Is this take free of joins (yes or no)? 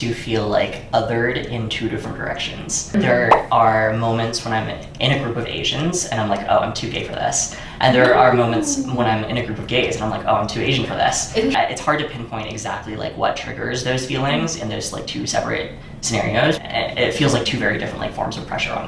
yes